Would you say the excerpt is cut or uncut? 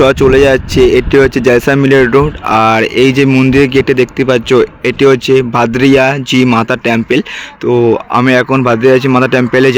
uncut